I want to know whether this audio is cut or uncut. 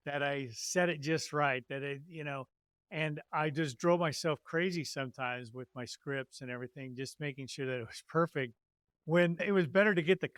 uncut